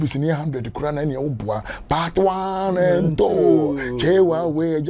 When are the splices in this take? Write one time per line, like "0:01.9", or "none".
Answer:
none